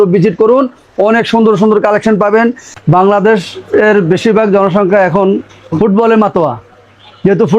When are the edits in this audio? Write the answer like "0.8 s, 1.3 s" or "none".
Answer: 2.8 s

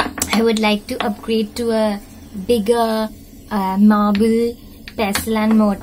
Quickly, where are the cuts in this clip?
none

